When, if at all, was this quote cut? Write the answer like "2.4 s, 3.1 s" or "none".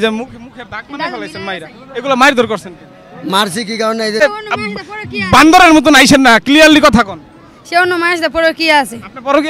4.2 s